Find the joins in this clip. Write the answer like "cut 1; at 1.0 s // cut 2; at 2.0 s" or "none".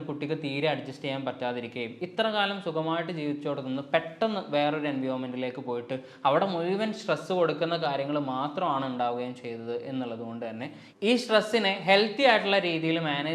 none